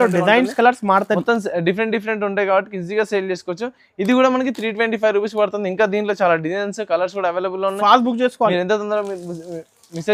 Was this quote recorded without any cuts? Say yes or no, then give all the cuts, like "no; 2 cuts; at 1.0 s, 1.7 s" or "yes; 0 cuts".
yes; 0 cuts